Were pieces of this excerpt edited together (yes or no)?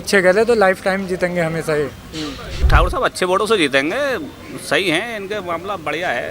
yes